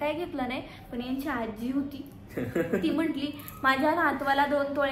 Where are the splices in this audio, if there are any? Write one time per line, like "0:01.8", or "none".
none